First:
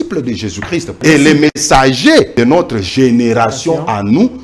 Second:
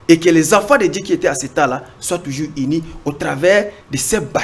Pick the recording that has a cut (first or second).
first